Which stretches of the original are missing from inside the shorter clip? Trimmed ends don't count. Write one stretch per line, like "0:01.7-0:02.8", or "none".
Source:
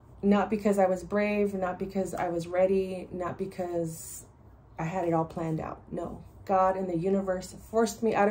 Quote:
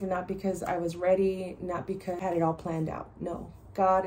0:03.7-0:04.9